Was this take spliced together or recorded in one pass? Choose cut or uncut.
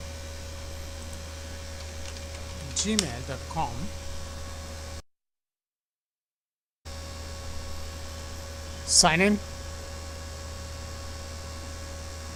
uncut